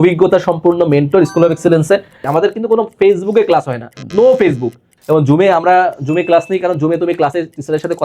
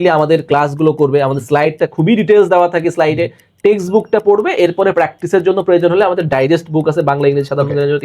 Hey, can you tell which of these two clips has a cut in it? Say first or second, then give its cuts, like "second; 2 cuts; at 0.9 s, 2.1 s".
first; 2 cuts; at 2.3 s, 4.9 s